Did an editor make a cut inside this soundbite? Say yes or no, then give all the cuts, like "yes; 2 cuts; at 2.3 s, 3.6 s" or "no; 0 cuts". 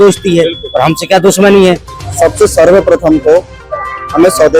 yes; 1 cut; at 1.9 s